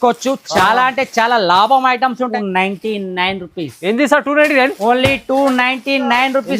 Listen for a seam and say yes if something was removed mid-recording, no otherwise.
yes